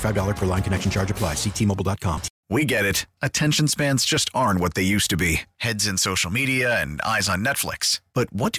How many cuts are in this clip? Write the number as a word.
one